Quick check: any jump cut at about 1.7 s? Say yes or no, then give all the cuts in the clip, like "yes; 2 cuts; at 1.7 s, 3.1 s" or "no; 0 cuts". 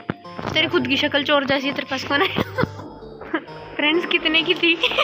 no; 1 cut; at 3.2 s